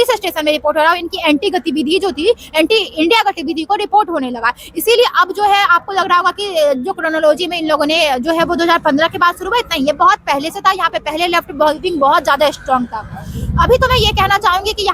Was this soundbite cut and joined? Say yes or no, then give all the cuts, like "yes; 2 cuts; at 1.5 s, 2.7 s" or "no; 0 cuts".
no; 0 cuts